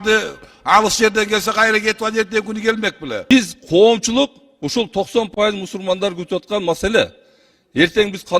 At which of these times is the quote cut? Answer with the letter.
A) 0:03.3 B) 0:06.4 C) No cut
A